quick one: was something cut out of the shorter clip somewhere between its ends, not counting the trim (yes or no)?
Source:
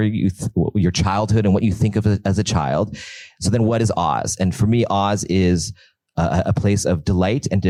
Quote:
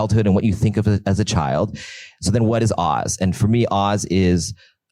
no